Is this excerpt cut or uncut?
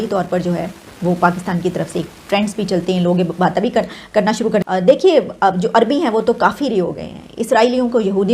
cut